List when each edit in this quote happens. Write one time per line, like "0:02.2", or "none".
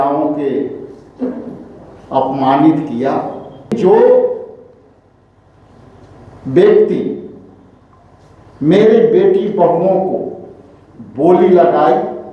0:03.7